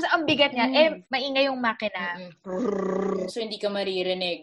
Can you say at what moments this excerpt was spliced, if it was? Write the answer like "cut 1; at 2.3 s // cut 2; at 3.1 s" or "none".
cut 1; at 1.0 s